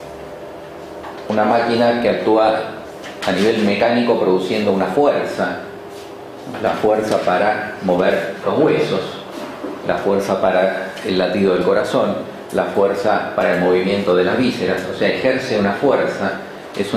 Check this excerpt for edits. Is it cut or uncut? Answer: uncut